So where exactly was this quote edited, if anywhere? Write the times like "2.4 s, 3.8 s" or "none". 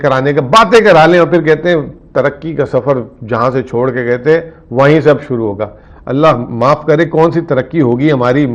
none